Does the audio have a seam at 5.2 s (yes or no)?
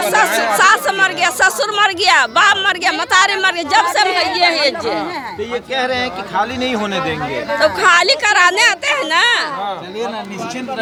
no